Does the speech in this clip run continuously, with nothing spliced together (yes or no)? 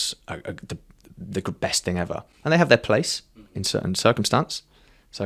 yes